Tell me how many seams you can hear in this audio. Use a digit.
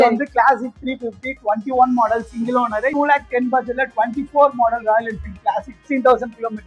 2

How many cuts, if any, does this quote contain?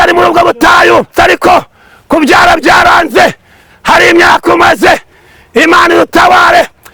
1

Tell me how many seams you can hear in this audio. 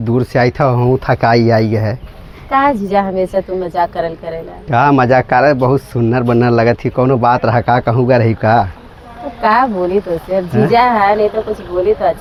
0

